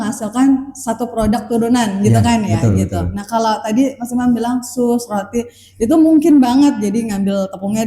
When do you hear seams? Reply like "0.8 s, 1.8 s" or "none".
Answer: none